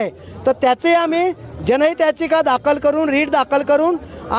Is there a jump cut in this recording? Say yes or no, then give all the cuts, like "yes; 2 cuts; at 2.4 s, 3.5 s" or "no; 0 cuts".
no; 0 cuts